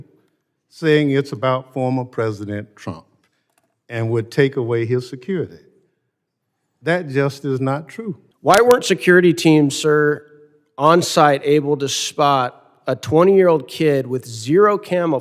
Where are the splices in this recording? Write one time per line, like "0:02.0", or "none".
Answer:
0:08.2

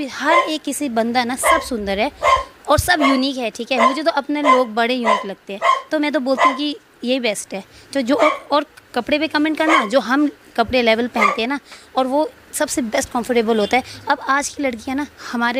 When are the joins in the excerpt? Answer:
none

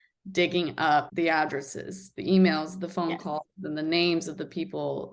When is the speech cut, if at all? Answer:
0:01.1

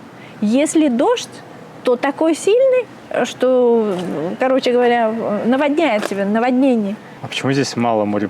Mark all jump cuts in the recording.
0:07.2

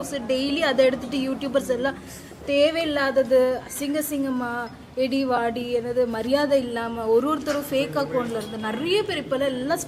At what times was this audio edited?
none

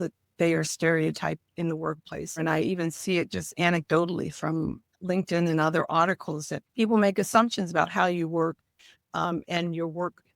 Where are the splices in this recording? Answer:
0:02.4
0:04.9
0:06.6

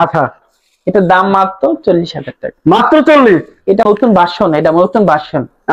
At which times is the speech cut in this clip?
0:03.9

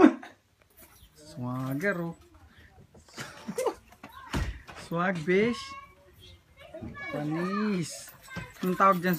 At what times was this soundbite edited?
0:05.3

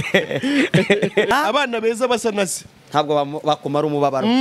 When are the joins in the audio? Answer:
0:01.3

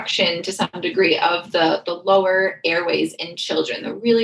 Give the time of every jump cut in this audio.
none

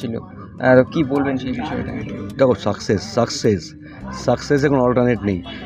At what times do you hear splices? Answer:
none

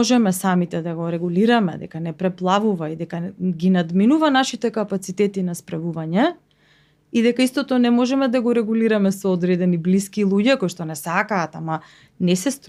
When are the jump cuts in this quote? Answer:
none

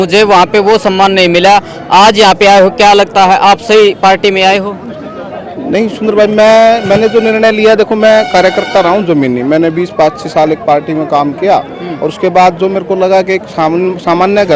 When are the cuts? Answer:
none

